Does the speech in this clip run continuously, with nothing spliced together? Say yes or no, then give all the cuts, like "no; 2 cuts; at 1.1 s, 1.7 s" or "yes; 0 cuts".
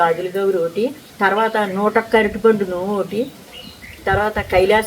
no; 1 cut; at 1.0 s